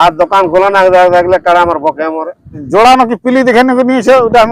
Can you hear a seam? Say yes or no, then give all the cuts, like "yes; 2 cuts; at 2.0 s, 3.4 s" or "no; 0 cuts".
yes; 1 cut; at 2.5 s